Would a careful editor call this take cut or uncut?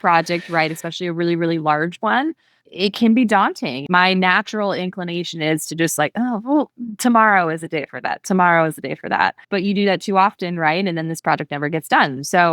cut